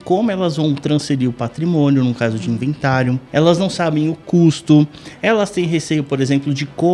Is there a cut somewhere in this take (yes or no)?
yes